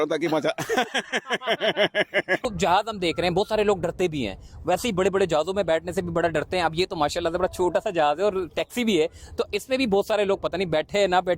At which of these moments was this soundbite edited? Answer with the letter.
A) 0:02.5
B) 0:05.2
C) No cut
A